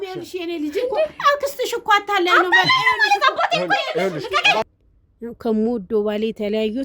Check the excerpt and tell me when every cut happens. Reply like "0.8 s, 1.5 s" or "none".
4.8 s